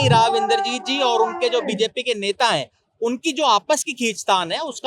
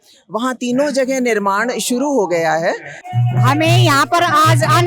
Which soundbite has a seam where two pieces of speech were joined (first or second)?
second